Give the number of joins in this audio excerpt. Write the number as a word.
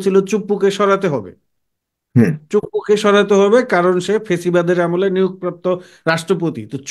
zero